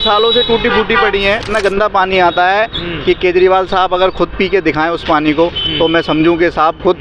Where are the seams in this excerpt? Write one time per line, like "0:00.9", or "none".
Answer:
0:01.5